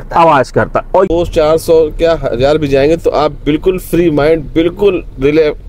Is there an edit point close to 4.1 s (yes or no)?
no